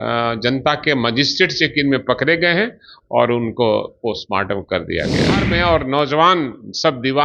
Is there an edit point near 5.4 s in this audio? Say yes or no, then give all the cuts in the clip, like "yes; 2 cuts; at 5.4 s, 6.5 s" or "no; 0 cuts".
yes; 1 cut; at 5.4 s